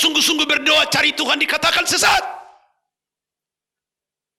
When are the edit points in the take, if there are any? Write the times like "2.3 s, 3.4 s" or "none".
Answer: none